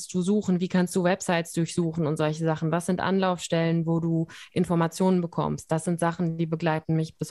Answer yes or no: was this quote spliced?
no